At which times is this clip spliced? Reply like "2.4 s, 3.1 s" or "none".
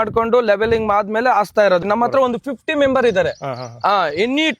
1.8 s